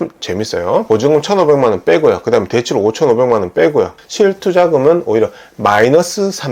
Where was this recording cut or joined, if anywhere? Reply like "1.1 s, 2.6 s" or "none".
0.8 s, 4.0 s